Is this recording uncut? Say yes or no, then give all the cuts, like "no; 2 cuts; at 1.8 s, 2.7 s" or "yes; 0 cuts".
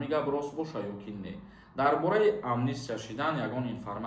yes; 0 cuts